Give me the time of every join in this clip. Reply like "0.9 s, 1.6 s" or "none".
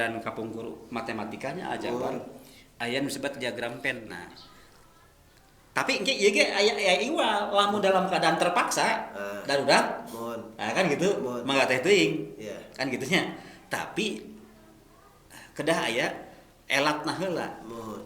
4.0 s